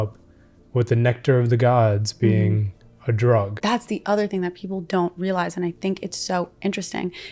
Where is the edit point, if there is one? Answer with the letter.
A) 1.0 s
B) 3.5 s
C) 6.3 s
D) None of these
B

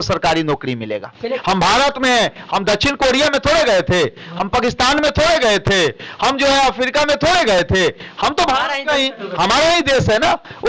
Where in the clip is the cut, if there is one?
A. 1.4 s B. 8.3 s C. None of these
A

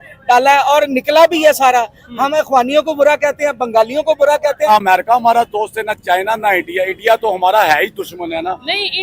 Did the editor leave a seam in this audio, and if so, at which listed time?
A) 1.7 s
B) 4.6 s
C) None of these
B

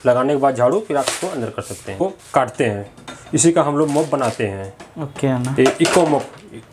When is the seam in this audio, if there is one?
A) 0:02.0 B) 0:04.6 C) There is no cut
A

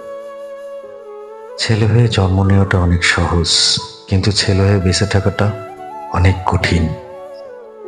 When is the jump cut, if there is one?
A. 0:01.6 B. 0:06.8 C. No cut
A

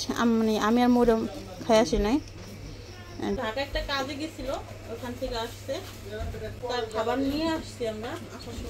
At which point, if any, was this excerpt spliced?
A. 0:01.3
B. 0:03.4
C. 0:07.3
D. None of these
B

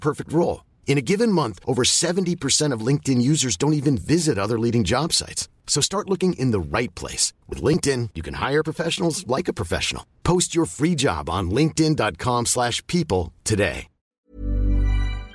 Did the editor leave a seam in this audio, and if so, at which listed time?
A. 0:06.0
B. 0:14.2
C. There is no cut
B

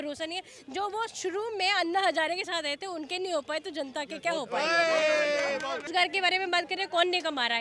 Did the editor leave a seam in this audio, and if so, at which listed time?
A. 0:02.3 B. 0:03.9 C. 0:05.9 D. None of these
C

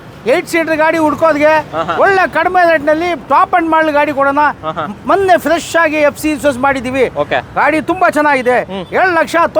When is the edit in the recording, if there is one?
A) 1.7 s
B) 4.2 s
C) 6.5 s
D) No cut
D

